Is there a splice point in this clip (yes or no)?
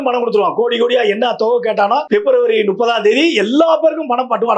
yes